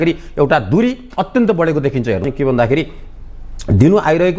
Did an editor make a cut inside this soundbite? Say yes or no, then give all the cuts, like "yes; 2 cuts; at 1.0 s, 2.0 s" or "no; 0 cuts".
yes; 1 cut; at 2.3 s